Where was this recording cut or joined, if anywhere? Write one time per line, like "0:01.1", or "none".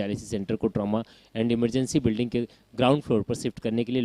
0:02.6
0:03.3